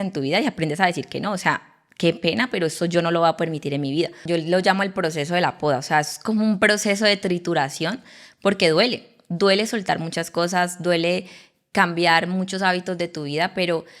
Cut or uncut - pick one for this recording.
cut